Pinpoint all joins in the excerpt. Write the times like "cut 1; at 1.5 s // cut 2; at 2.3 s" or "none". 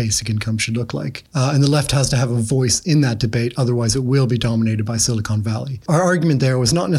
cut 1; at 1.2 s // cut 2; at 5.8 s